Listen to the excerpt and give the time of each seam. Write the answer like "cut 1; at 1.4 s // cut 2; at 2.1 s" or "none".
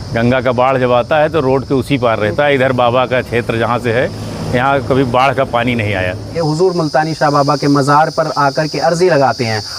cut 1; at 6.3 s